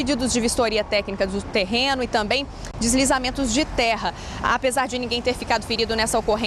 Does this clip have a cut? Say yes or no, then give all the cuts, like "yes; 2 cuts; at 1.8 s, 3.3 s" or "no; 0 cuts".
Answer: no; 0 cuts